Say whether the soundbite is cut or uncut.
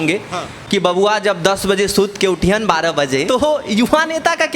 cut